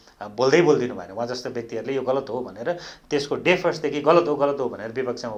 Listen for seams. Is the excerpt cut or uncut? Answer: uncut